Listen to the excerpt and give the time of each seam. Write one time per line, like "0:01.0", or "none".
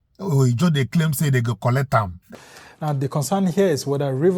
0:02.3